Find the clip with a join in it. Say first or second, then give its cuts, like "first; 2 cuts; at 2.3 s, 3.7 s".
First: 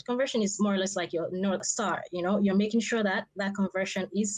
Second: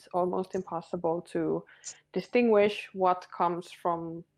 first; 1 cut; at 1.7 s